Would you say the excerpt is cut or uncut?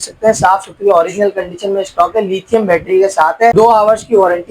cut